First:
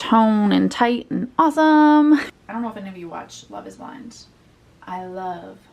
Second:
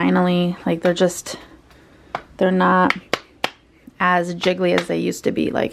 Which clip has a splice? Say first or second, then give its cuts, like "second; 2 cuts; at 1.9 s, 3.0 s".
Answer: first; 1 cut; at 2.3 s